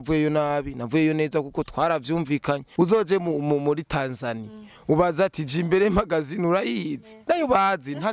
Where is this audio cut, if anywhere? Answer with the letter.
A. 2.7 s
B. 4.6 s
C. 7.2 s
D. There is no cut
A